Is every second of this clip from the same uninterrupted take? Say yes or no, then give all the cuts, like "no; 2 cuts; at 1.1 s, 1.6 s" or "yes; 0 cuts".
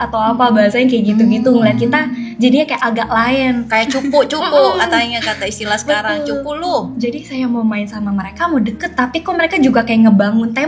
yes; 0 cuts